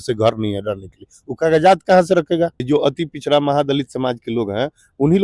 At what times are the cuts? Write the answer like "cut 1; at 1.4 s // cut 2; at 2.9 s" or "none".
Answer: cut 1; at 2.6 s